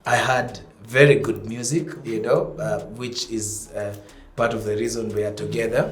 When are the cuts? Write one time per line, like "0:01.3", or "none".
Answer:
none